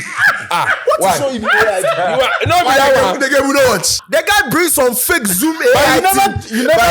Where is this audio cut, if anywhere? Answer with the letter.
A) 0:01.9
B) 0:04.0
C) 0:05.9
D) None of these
B